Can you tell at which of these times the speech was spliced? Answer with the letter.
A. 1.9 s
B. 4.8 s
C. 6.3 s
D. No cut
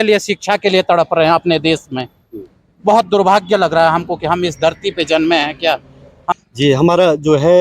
C